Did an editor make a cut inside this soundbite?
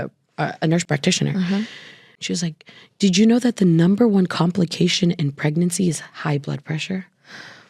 no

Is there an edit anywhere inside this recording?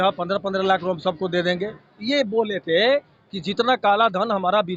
no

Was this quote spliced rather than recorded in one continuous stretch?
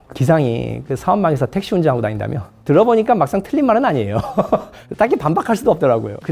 yes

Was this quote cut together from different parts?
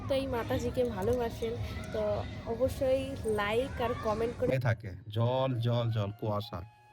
yes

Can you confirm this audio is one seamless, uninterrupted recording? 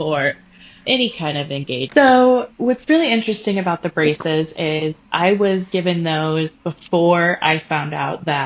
no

